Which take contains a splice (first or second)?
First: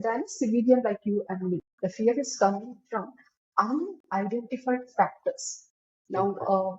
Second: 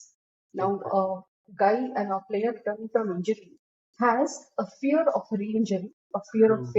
first